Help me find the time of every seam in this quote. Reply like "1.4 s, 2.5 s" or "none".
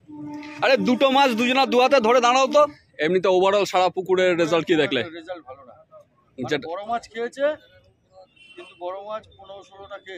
2.9 s